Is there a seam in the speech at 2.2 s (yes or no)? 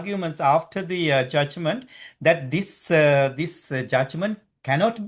no